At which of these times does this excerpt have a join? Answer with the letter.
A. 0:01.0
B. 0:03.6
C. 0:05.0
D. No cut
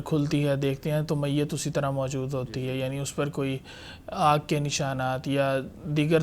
D